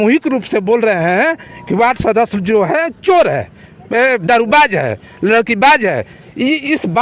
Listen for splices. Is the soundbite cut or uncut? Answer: uncut